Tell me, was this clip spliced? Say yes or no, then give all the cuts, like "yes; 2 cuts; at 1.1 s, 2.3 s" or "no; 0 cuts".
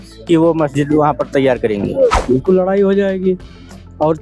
yes; 1 cut; at 2.2 s